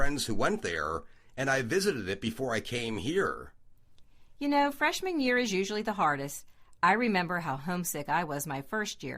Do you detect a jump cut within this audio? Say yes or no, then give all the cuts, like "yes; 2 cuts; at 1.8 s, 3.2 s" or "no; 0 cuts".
yes; 1 cut; at 7.9 s